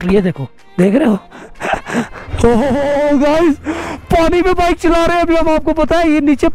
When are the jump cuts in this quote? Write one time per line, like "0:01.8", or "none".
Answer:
0:02.2